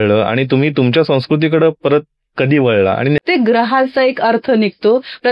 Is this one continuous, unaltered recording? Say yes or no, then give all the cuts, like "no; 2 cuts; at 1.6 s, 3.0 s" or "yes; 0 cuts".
no; 1 cut; at 3.2 s